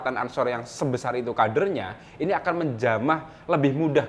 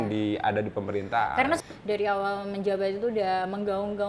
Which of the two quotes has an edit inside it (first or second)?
second